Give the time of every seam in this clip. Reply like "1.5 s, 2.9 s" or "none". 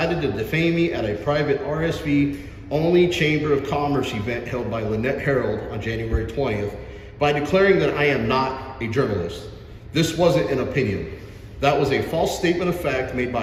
none